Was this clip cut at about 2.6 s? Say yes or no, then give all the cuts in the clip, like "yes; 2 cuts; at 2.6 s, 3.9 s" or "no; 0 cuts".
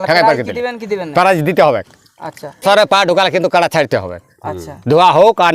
yes; 1 cut; at 2.6 s